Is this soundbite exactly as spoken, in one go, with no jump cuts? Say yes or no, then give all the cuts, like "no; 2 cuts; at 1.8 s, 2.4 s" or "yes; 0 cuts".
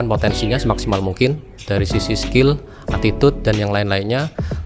yes; 0 cuts